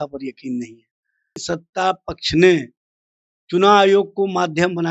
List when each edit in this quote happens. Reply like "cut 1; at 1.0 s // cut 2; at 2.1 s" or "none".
cut 1; at 1.5 s